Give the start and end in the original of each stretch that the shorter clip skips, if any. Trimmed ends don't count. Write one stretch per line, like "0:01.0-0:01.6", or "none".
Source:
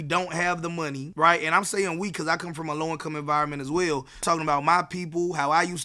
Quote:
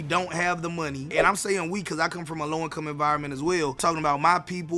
0:01.1-0:01.4
0:04.0-0:04.2

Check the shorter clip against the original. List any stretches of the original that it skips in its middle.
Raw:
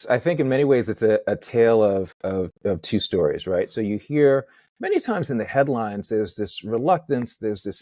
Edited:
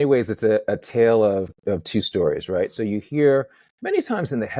0:02.1-0:02.5

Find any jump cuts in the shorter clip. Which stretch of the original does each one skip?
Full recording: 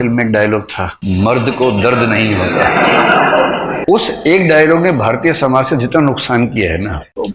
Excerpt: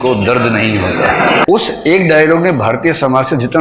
0:03.0-0:03.8

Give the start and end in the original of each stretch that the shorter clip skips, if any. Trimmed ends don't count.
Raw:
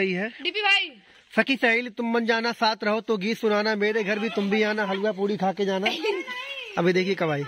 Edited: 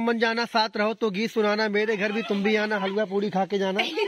none

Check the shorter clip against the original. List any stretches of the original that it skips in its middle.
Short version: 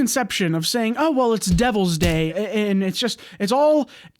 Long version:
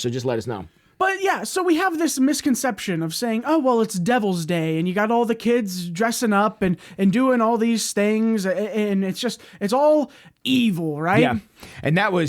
0:04.8-0:08.5

